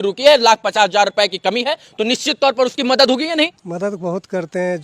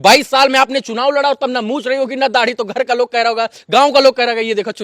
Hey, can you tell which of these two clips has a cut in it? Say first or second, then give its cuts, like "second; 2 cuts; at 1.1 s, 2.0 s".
first; 1 cut; at 3.6 s